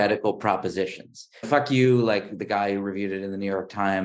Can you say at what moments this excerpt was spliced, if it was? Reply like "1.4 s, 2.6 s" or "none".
1.5 s